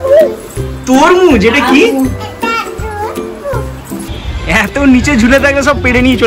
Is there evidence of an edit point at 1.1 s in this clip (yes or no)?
no